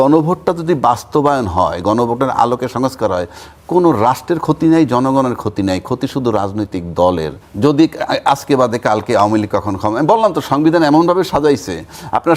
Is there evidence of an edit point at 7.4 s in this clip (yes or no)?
yes